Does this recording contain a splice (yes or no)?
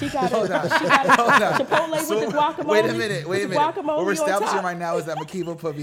no